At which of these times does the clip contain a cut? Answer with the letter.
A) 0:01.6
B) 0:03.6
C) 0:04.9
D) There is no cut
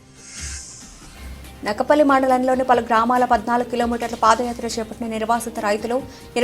A